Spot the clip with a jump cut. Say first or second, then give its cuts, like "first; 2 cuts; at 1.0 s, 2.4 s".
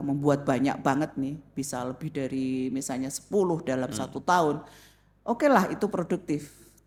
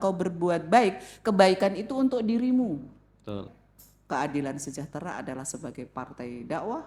second; 1 cut; at 3.5 s